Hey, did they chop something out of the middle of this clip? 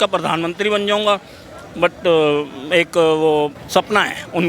yes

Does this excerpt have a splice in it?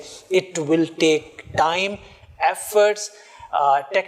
no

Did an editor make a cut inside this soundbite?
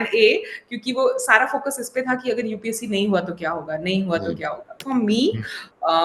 yes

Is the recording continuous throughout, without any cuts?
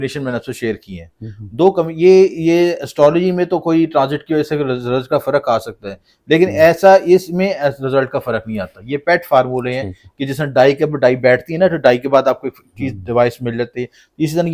yes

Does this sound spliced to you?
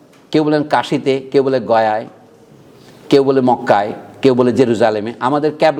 no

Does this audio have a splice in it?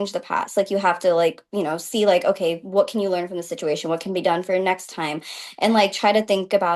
no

